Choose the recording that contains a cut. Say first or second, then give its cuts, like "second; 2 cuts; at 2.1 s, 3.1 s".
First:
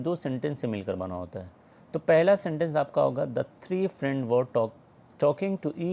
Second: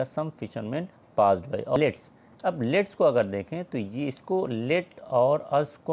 second; 1 cut; at 1.8 s